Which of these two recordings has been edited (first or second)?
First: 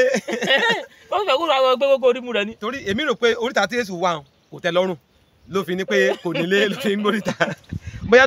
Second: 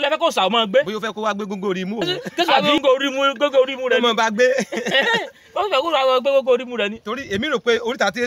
second